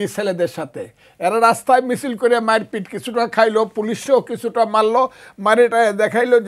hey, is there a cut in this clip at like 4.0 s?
no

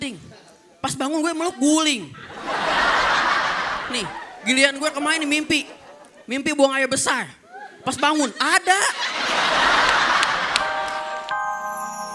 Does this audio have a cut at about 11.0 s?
yes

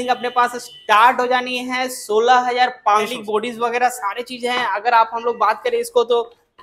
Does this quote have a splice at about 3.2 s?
yes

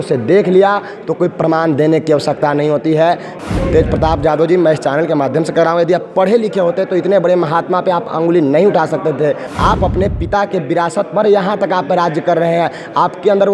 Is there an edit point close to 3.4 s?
yes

